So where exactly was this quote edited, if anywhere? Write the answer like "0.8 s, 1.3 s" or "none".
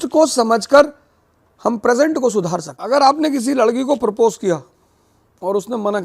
2.7 s